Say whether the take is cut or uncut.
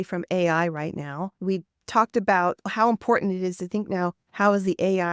cut